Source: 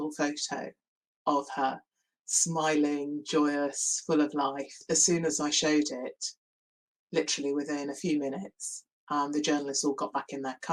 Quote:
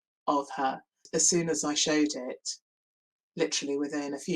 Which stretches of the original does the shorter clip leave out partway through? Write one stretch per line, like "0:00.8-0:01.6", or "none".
0:01.9-0:04.7